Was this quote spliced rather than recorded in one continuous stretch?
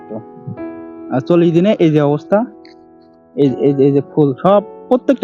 no; 0 cuts

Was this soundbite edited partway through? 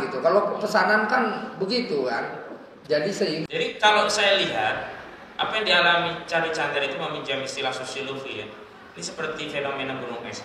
yes; 1 cut; at 3.4 s

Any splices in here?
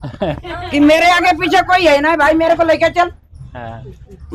no; 0 cuts

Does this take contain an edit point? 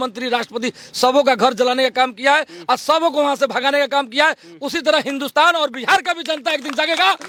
no; 0 cuts

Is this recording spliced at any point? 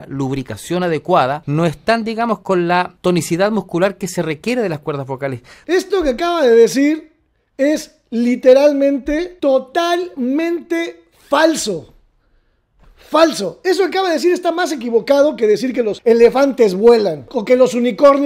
yes; 4 cuts; at 1.4 s, 2.9 s, 5.5 s, 9.3 s

